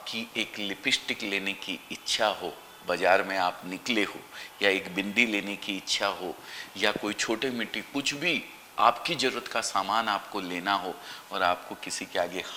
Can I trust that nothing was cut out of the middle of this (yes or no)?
yes